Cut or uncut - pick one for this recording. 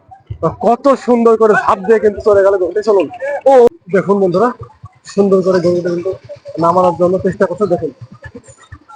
cut